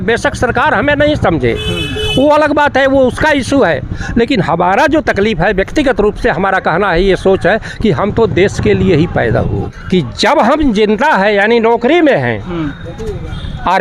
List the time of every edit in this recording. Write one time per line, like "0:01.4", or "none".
0:09.7